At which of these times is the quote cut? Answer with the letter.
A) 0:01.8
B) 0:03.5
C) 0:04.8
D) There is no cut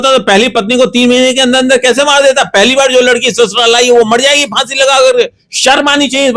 D